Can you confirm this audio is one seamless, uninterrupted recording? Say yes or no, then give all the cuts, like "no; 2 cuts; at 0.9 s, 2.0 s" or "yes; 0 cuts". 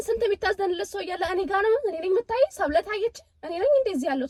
yes; 0 cuts